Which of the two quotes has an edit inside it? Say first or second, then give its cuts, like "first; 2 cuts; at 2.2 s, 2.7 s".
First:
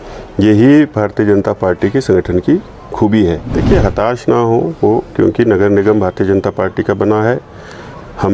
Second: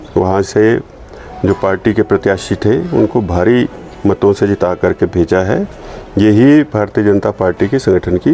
first; 1 cut; at 3.5 s